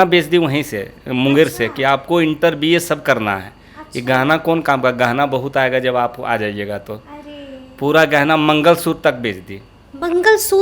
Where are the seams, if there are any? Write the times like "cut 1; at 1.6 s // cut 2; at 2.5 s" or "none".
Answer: none